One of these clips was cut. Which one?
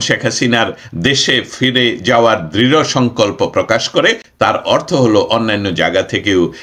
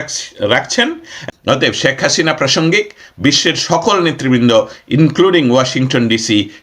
second; 1 cut; at 1.2 s

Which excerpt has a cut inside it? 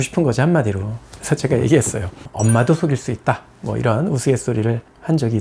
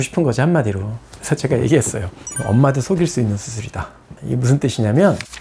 first; 1 cut; at 2.2 s

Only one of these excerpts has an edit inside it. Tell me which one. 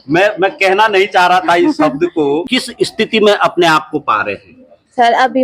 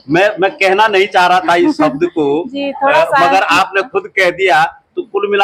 first; 1 cut; at 2.5 s

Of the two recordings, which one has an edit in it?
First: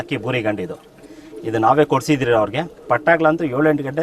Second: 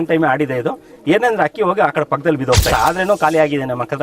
second; 1 cut; at 2.7 s

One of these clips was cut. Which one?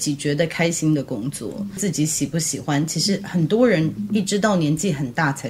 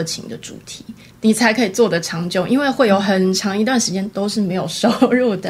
first; 1 cut; at 1.8 s

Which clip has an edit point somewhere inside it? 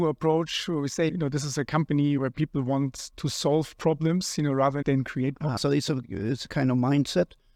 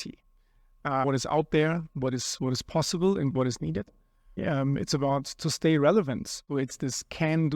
second; 3 cuts; at 1.0 s, 4.4 s, 6.5 s

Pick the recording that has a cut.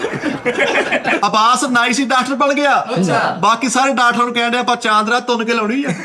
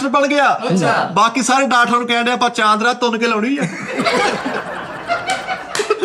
first; 1 cut; at 1.2 s

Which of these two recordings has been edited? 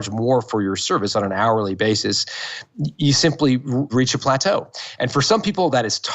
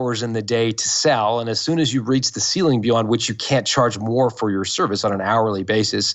first; 1 cut; at 3.9 s

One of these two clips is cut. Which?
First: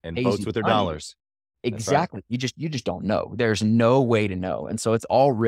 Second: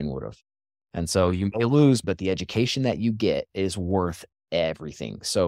second; 2 cuts; at 2.0 s, 3.5 s

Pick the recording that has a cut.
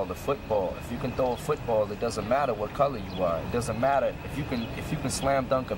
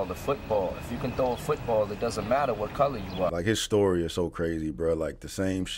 second; 1 cut; at 3.3 s

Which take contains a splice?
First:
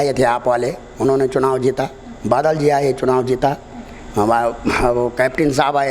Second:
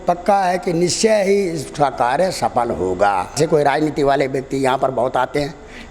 second; 1 cut; at 3.3 s

